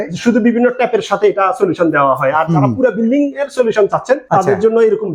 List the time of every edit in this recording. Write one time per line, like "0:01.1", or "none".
0:04.2